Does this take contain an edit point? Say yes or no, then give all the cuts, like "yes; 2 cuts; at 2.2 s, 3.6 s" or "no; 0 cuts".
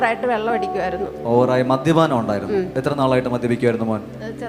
no; 0 cuts